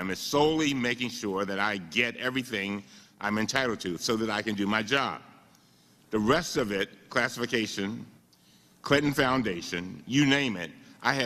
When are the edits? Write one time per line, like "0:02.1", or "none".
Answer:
0:08.4